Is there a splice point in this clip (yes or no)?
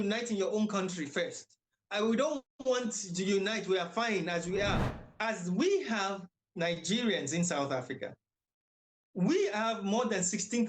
yes